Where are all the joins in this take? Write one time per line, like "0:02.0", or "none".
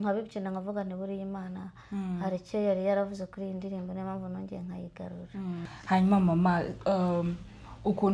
0:05.7